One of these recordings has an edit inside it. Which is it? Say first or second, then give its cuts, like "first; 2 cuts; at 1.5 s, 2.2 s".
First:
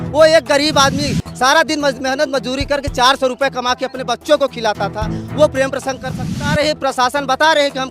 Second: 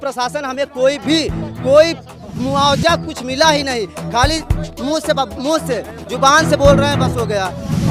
first; 1 cut; at 6.3 s